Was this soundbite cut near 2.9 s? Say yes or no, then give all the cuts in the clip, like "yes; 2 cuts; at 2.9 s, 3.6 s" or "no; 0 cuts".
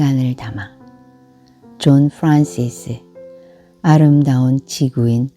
no; 0 cuts